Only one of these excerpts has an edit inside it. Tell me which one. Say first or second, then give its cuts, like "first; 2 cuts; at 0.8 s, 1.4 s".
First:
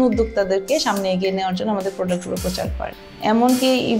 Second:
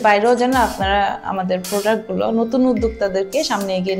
first; 1 cut; at 2.9 s